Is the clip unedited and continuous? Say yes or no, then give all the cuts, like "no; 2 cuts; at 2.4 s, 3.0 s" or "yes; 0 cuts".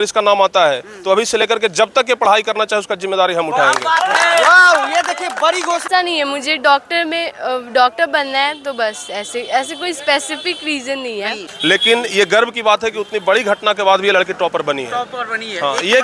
no; 2 cuts; at 5.9 s, 11.4 s